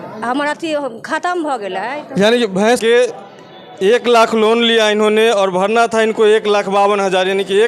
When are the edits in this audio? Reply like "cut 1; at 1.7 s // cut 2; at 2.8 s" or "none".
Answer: cut 1; at 2.8 s

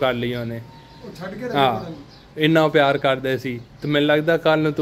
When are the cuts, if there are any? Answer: none

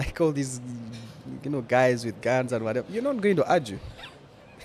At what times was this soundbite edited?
none

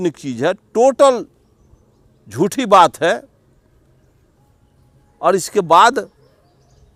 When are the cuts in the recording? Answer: none

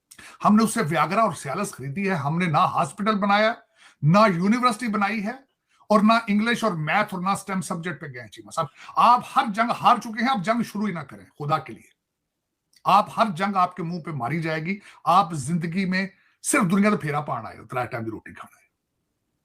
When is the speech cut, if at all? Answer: cut 1; at 8.8 s

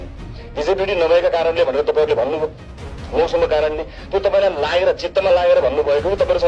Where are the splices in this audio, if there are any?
none

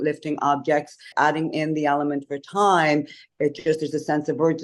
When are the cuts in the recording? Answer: cut 1; at 1.1 s

